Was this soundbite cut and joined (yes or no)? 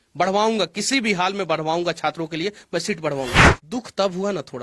yes